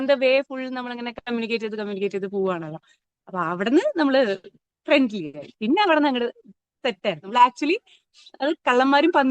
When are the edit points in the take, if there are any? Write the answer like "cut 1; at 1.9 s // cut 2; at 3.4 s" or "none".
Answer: cut 1; at 7.2 s